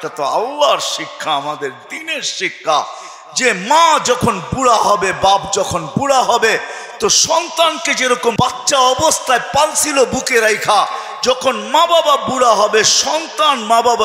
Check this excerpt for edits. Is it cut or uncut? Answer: cut